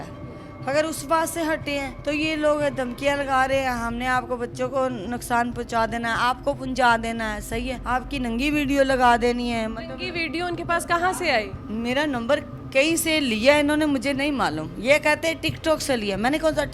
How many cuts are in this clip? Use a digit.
3